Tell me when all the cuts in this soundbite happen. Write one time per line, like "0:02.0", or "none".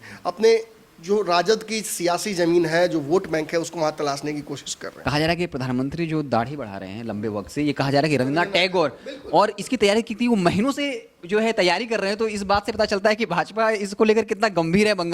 0:04.9